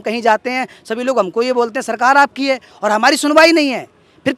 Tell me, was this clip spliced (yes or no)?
no